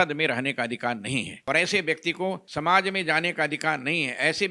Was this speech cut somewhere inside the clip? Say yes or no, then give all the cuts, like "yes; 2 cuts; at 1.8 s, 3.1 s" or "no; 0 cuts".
yes; 2 cuts; at 1.3 s, 2.5 s